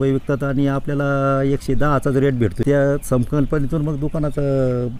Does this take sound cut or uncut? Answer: cut